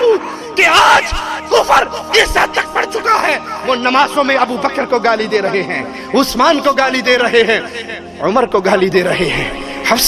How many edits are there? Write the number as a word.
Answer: zero